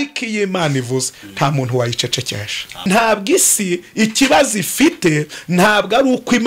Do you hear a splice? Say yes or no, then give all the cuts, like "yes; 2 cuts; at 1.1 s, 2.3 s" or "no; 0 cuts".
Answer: yes; 1 cut; at 2.7 s